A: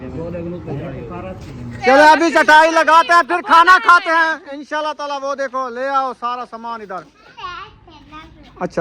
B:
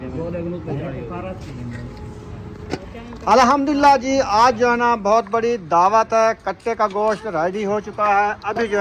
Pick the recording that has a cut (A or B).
A